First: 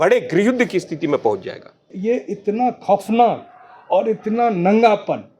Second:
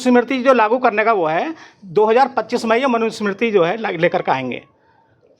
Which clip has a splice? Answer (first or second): first